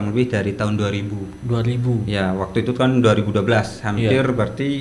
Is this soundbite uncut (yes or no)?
yes